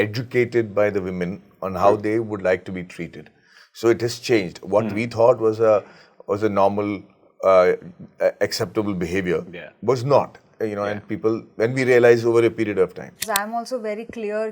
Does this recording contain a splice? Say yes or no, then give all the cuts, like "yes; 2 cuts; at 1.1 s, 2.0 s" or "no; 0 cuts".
yes; 1 cut; at 13.3 s